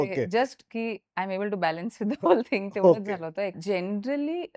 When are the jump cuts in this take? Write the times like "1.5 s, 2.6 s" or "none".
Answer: 3.5 s